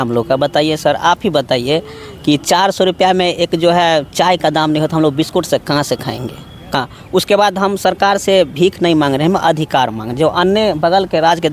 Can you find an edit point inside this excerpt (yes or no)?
yes